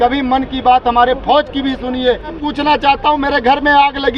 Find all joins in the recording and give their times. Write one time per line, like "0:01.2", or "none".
0:02.4